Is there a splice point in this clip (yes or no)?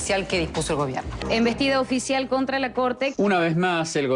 yes